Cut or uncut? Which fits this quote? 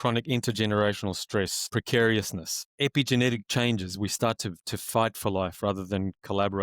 cut